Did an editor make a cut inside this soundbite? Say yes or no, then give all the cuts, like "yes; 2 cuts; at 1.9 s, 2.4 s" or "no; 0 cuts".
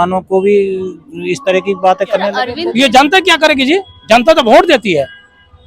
yes; 1 cut; at 2.5 s